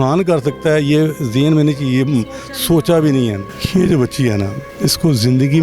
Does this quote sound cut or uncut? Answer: cut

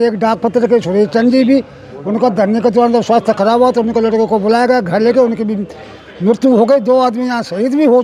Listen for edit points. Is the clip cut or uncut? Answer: uncut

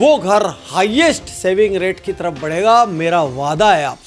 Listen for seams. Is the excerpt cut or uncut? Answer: uncut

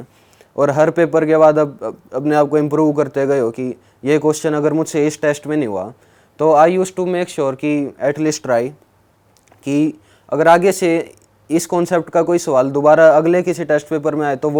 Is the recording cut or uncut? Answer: uncut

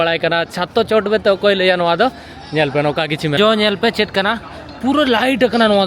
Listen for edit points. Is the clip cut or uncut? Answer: cut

